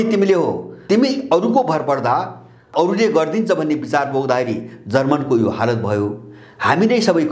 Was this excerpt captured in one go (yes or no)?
no